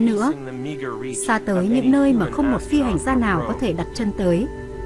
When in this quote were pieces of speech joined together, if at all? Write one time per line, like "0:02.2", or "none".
0:02.6

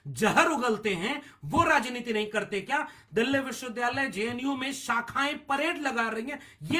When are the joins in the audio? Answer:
none

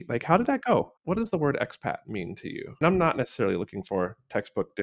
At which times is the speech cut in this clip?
0:01.0
0:02.7

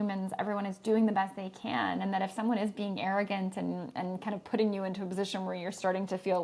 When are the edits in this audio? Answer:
none

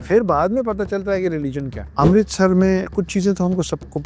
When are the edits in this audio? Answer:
0:01.8

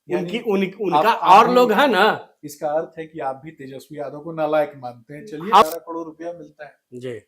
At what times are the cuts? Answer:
0:05.6

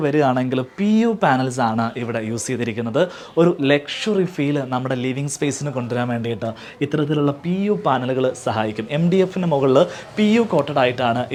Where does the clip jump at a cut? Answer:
none

